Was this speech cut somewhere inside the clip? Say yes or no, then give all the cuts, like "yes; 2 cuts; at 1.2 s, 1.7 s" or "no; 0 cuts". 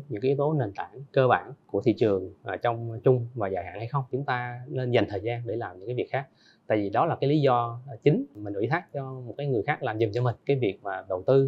yes; 4 cuts; at 1.6 s, 4.1 s, 8.3 s, 10.4 s